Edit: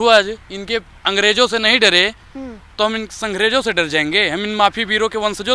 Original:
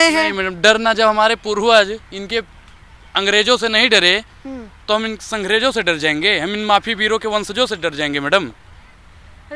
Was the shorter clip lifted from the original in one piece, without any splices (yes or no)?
no